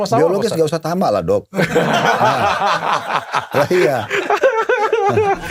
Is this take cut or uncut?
uncut